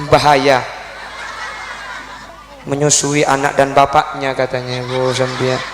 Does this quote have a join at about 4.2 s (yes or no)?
no